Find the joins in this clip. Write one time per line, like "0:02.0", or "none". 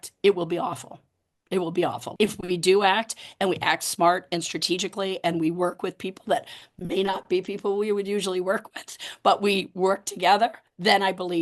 0:02.1